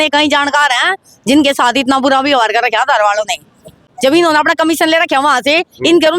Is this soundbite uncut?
no; 1 cut; at 3.9 s

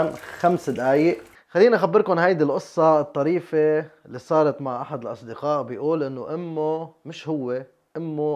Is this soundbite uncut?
no; 1 cut; at 1.3 s

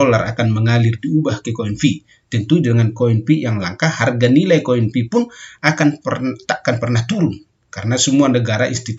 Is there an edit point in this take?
no; 0 cuts

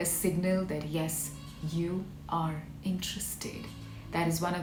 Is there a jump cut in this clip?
no; 0 cuts

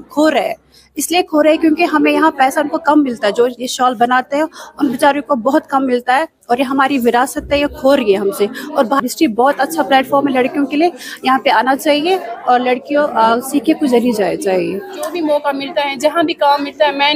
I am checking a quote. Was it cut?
yes; 2 cuts; at 9.0 s, 15.2 s

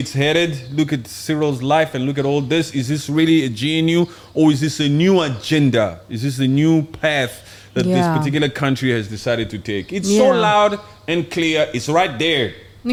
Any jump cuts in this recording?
no; 0 cuts

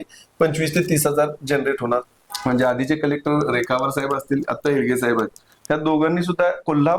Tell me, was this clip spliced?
yes; 1 cut; at 2.2 s

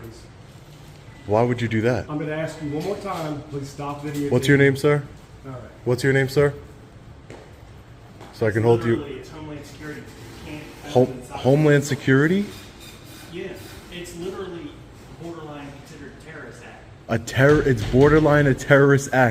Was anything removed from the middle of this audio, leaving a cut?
no; 0 cuts

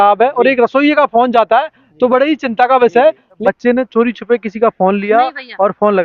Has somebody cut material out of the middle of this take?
yes; 1 cut; at 3.4 s

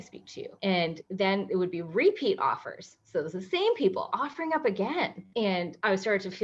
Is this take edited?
no; 0 cuts

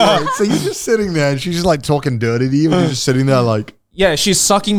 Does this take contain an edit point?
no; 0 cuts

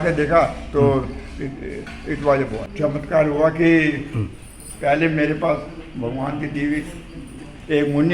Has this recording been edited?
yes; 1 cut; at 2.7 s

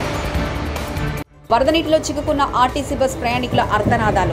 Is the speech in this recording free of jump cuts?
no; 1 cut; at 1.3 s

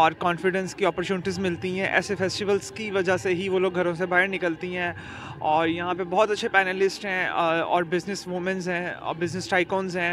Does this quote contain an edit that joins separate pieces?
no; 0 cuts

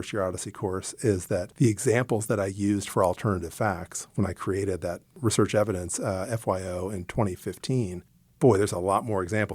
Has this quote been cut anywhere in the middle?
no; 0 cuts

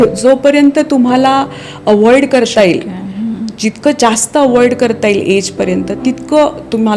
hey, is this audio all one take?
yes; 0 cuts

